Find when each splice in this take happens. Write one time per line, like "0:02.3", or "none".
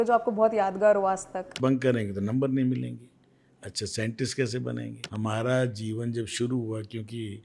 0:01.5
0:05.0